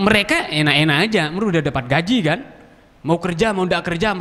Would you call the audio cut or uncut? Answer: uncut